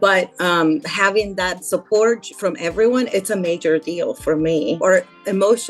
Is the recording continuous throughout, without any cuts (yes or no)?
no